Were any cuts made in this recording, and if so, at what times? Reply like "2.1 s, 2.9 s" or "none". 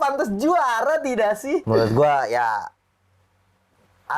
1.6 s